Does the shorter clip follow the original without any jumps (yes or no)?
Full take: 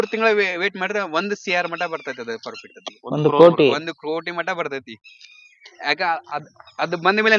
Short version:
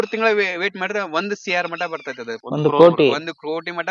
no